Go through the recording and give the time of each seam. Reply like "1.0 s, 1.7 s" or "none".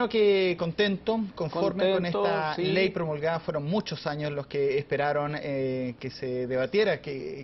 5.5 s